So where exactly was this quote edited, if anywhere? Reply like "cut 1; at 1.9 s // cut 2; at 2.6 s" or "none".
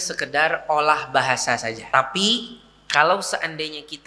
cut 1; at 1.8 s